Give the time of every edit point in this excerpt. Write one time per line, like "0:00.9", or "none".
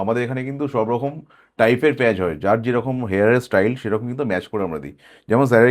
none